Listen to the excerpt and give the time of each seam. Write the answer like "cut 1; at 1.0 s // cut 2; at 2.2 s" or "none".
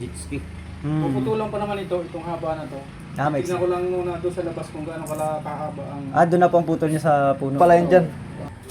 cut 1; at 7.5 s

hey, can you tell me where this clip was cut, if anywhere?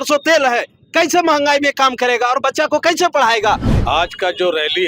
cut 1; at 3.7 s

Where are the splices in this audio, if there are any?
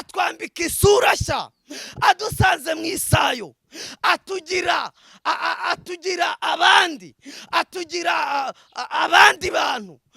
none

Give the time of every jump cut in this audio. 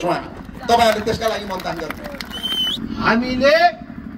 cut 1; at 2.8 s

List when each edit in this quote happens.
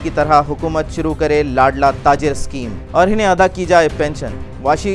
none

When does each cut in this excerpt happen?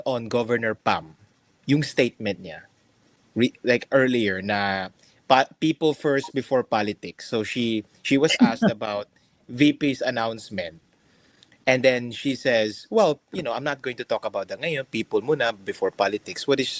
none

